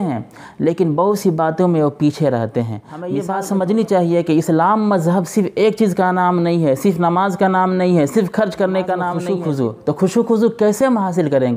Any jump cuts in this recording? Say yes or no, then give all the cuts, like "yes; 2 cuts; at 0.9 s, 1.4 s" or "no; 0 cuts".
yes; 2 cuts; at 3.1 s, 9.1 s